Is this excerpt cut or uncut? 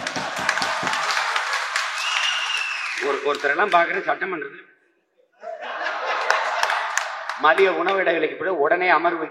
uncut